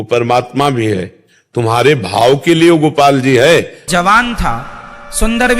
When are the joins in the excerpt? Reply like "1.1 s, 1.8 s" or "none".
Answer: 3.9 s